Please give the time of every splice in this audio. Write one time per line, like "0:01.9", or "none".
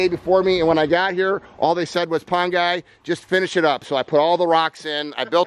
none